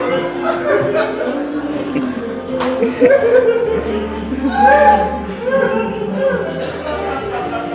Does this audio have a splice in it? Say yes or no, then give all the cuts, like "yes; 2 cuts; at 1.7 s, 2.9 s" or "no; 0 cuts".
no; 0 cuts